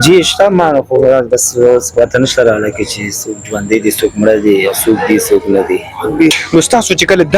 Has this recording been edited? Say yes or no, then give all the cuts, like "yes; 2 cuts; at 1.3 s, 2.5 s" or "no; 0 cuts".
yes; 1 cut; at 6.3 s